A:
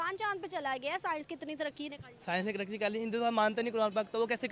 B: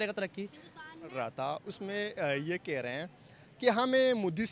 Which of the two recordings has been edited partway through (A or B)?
B